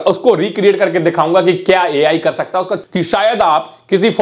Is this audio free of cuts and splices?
no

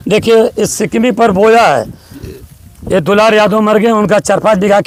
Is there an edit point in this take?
no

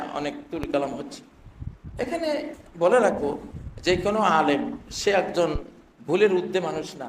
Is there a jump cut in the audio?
no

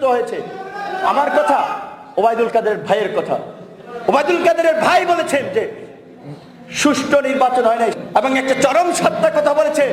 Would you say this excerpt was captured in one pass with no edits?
no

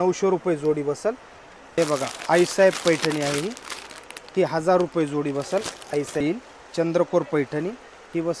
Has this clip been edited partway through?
yes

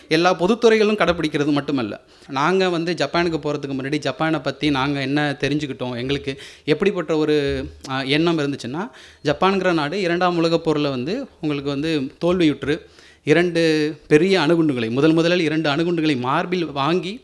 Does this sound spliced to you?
yes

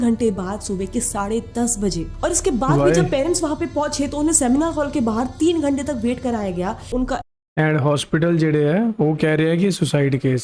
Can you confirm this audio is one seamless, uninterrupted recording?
no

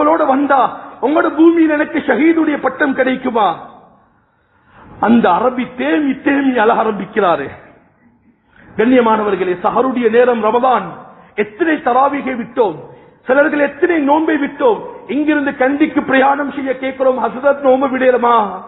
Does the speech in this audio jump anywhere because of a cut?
no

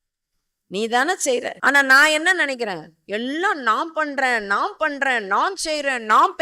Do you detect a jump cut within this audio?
yes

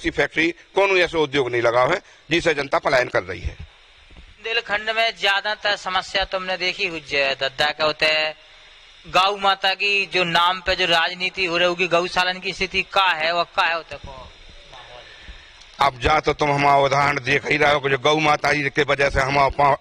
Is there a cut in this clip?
yes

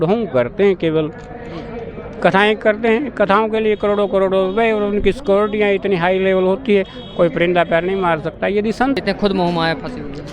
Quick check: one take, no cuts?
no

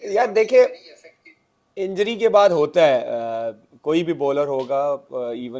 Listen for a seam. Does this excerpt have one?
no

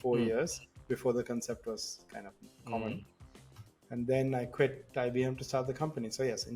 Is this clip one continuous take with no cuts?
yes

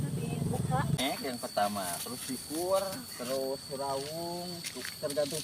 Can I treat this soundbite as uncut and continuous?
no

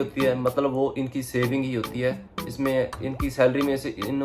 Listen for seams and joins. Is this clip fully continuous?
yes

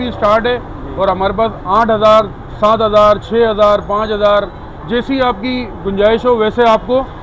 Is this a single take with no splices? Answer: yes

